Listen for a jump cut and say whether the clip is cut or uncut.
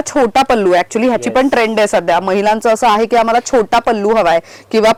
uncut